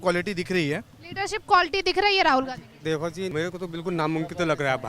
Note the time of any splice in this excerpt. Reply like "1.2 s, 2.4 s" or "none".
3.0 s